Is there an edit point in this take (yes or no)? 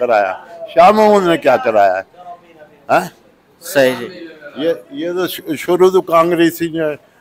no